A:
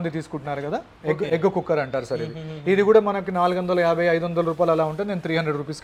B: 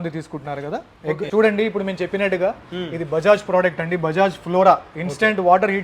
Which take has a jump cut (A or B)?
B